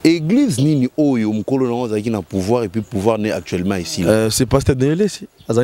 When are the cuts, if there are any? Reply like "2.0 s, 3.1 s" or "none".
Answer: none